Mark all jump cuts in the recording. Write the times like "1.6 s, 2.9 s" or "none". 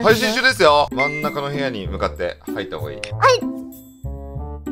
0.9 s